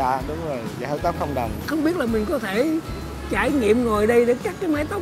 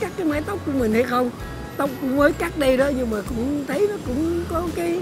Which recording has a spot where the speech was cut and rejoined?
first; 1 cut; at 1.7 s

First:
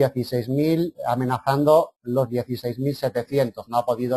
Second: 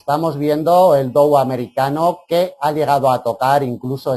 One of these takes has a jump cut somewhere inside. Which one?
second; 1 cut; at 1.7 s

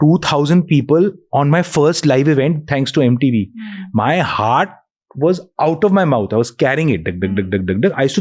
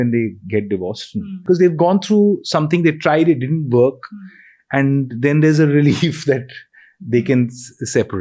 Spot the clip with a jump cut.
second; 1 cut; at 1.3 s

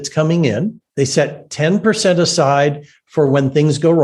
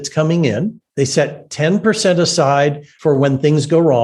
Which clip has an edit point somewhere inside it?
second; 1 cut; at 2.9 s

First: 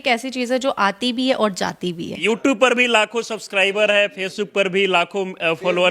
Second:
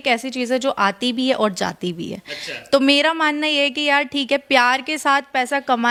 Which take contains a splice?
first; 1 cut; at 2.2 s

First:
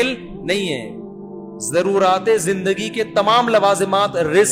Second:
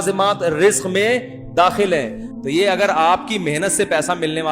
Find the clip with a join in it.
second; 1 cut; at 2.2 s

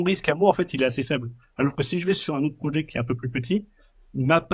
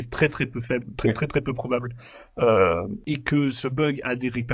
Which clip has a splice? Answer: second; 1 cut; at 3.0 s

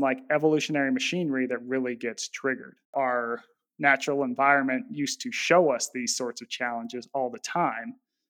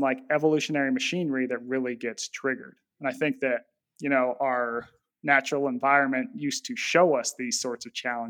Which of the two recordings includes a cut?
first; 1 cut; at 2.9 s

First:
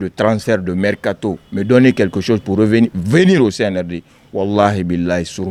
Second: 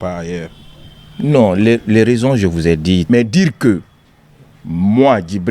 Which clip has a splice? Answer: second; 1 cut; at 3.0 s

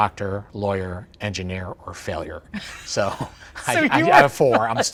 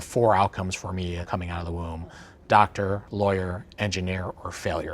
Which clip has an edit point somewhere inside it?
second; 1 cut; at 1.2 s

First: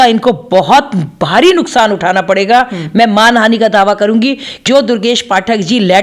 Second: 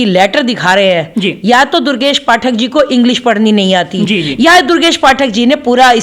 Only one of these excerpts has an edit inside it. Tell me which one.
first; 1 cut; at 4.6 s

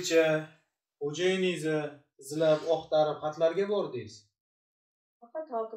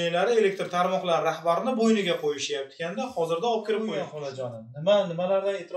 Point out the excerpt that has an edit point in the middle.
second; 1 cut; at 3.9 s

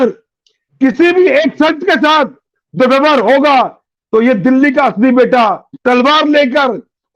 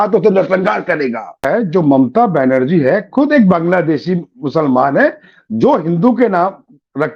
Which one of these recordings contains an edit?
second; 1 cut; at 1.4 s

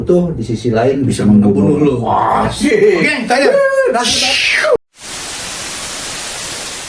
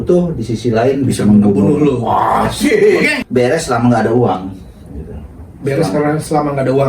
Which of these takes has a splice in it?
second; 1 cut; at 3.2 s

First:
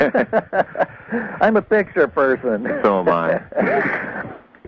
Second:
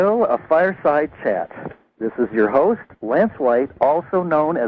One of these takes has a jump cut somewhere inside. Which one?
first; 1 cut; at 1.5 s

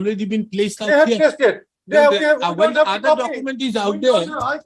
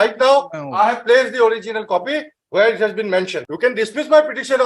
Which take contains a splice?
second; 1 cut; at 3.4 s

